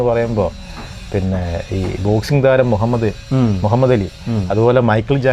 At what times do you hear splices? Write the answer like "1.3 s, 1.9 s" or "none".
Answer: none